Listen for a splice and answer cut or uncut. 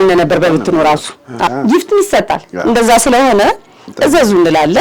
cut